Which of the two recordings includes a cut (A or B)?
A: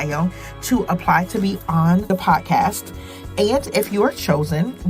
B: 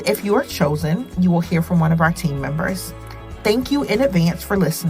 A